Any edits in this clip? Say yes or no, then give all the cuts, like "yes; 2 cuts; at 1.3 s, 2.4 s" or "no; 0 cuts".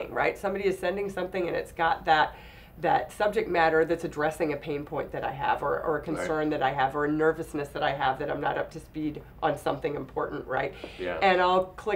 no; 0 cuts